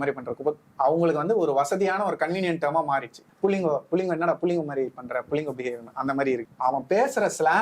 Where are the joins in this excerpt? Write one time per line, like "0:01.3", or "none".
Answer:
0:03.2
0:06.5